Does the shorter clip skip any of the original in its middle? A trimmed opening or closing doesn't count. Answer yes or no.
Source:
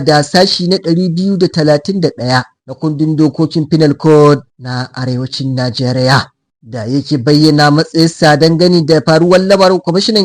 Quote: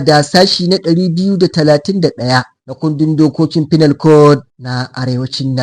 no